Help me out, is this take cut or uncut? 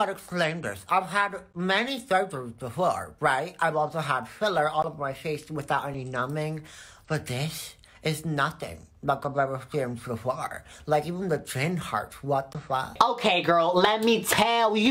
uncut